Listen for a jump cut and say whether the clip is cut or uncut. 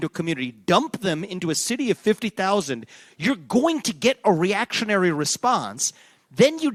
uncut